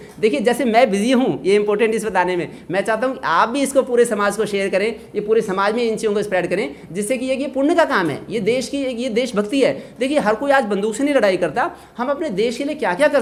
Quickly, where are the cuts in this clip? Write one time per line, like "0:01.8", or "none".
none